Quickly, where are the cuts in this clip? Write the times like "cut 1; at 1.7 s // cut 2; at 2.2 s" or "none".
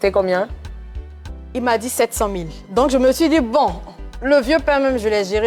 none